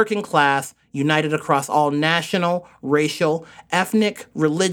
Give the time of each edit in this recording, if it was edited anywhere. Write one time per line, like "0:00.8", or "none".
none